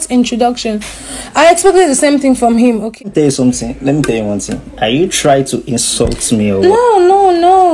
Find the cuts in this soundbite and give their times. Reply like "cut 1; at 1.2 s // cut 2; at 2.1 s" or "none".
cut 1; at 3.0 s